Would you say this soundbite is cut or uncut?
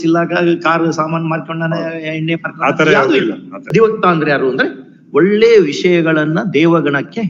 cut